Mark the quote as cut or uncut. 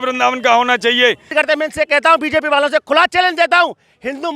cut